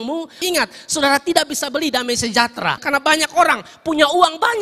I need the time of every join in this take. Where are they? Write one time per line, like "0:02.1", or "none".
0:02.8